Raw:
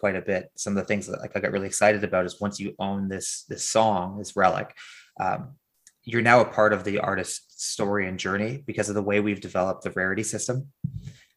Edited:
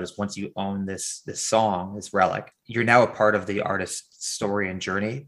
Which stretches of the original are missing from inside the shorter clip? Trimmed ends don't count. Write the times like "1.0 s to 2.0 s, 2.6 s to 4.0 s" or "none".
4.8 s to 5.9 s